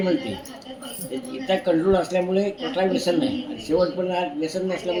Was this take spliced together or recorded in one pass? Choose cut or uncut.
uncut